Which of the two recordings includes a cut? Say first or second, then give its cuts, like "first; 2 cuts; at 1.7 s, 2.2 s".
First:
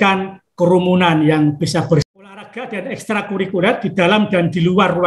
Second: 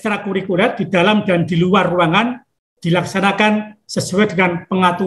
first; 1 cut; at 2.0 s